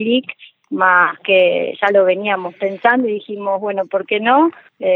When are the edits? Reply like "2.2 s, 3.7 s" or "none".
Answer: none